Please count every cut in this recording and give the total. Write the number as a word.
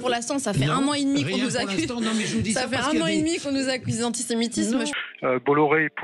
one